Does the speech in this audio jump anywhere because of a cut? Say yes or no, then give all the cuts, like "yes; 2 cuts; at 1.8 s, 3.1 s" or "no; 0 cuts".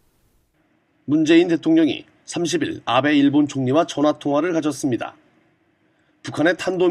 no; 0 cuts